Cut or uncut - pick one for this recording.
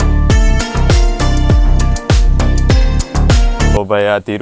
uncut